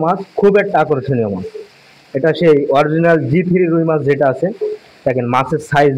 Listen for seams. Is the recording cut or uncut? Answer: uncut